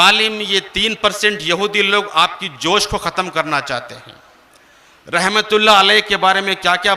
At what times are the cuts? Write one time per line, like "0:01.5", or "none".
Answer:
none